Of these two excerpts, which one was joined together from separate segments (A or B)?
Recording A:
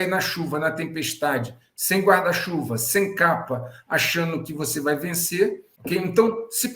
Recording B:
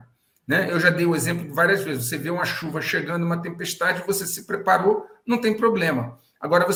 A